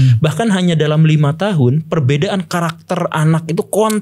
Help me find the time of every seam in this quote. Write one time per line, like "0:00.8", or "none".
none